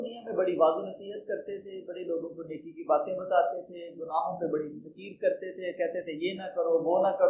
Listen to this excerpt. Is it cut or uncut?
uncut